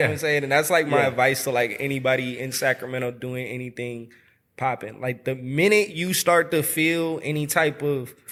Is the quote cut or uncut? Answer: uncut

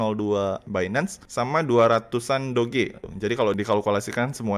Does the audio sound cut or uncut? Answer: cut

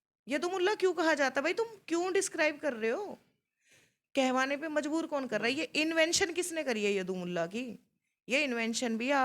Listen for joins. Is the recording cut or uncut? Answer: uncut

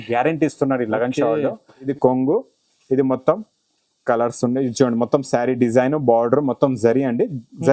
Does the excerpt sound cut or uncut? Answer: cut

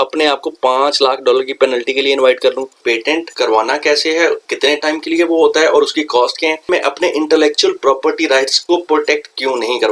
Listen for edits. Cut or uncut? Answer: cut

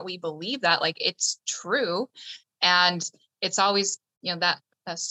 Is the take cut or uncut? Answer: cut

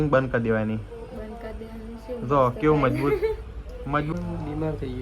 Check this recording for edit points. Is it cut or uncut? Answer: cut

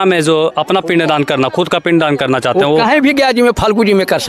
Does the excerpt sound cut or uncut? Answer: uncut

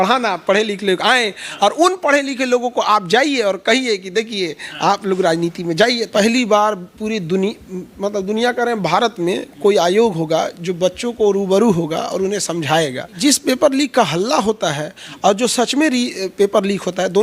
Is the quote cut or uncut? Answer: cut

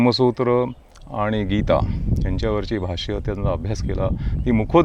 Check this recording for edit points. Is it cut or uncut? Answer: uncut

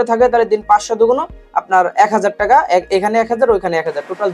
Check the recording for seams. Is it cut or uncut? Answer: uncut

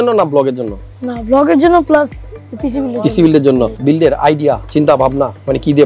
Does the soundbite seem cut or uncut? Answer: cut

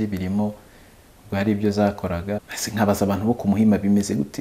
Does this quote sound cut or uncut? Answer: cut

